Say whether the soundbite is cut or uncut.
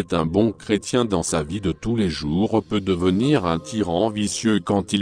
uncut